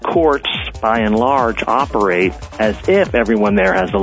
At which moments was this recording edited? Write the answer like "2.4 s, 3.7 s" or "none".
none